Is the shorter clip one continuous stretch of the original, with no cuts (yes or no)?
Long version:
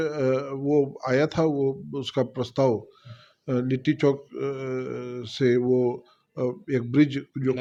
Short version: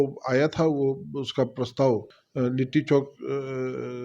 no